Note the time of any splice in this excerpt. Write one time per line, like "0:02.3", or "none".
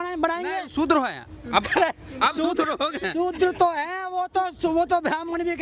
none

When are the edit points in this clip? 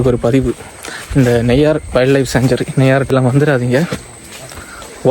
0:03.1

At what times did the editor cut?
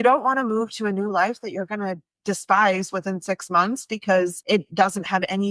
0:04.4

